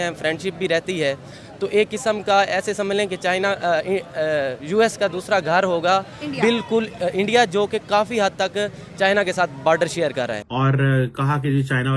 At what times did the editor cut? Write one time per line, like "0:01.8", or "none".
0:10.4

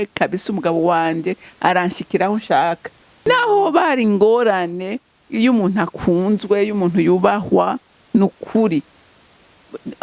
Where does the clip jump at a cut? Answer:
0:03.2

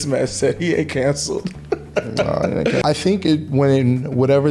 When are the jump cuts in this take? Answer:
0:02.8

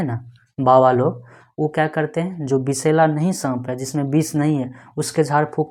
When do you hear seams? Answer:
none

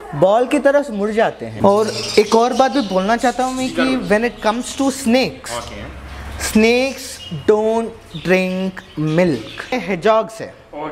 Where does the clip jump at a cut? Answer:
0:01.5
0:09.7

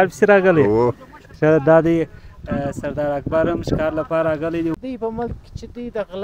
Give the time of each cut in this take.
0:04.8

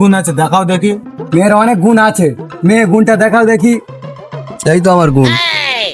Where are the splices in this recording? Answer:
none

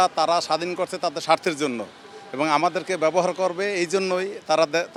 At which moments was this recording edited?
none

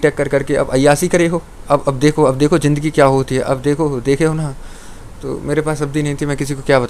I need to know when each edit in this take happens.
none

